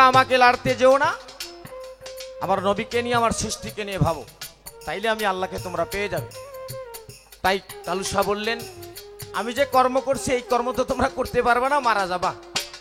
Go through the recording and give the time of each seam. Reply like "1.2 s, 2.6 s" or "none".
none